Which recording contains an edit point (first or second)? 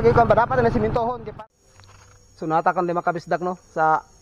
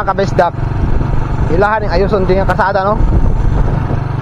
first